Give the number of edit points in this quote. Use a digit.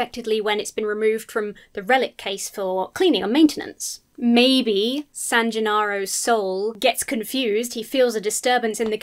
2